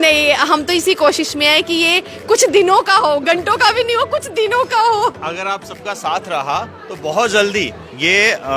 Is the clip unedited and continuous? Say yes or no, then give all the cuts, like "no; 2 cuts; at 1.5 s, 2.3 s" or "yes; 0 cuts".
yes; 0 cuts